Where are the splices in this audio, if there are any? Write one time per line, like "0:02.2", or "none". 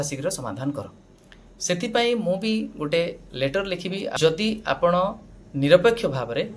0:04.2